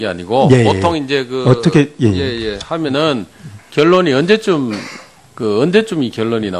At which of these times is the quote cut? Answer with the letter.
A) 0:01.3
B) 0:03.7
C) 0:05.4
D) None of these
D